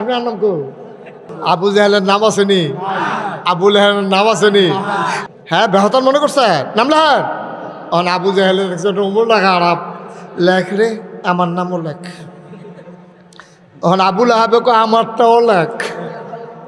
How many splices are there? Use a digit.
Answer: 2